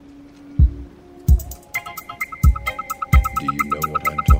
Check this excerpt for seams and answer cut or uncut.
cut